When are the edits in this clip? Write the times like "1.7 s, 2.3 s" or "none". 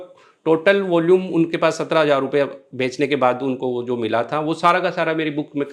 none